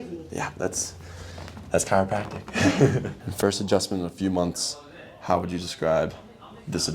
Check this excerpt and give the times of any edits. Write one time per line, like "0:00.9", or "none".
0:03.1